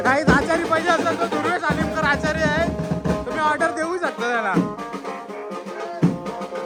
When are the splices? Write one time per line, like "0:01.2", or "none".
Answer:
none